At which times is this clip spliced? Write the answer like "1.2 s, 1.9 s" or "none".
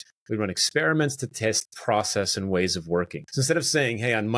3.2 s